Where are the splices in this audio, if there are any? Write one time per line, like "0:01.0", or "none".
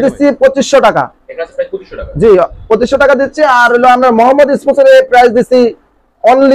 none